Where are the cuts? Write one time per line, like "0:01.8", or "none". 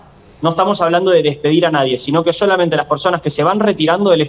none